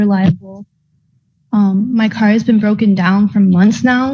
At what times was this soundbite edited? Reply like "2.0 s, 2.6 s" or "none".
none